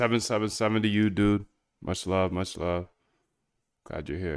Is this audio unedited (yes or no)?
yes